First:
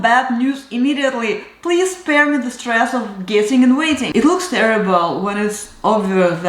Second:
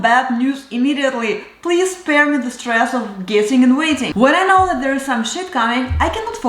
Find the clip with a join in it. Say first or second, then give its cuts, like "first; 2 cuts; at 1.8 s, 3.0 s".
first; 1 cut; at 4.1 s